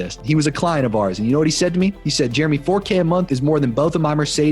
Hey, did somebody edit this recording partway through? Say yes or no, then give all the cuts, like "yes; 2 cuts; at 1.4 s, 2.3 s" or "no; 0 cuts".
yes; 2 cuts; at 2.0 s, 3.2 s